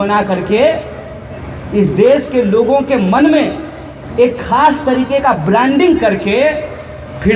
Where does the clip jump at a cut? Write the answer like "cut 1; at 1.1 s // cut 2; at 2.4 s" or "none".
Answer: none